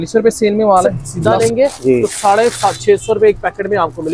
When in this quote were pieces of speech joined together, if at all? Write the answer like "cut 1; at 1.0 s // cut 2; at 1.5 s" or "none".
cut 1; at 1.0 s